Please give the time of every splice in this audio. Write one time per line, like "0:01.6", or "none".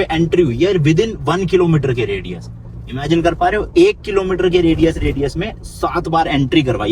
none